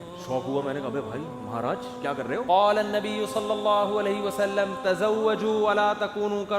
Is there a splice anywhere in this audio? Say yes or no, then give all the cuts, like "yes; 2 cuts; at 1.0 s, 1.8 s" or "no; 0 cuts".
yes; 1 cut; at 2.4 s